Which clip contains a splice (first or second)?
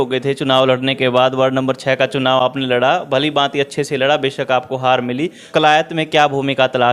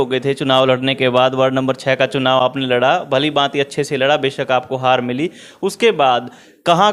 first